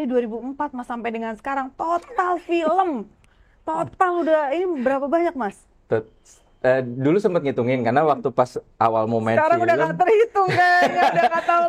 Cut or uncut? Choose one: uncut